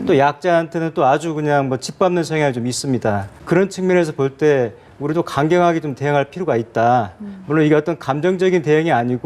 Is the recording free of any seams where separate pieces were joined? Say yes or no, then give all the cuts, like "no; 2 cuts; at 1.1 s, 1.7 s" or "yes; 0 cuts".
no; 1 cut; at 3.3 s